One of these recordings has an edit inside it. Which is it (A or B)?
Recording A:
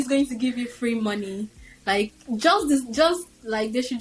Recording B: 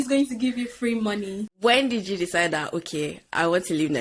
B